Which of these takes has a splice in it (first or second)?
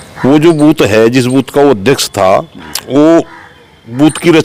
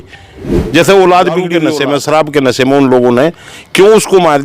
second